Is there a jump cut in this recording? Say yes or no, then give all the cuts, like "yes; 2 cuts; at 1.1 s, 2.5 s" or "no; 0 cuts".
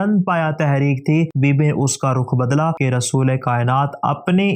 yes; 1 cut; at 2.8 s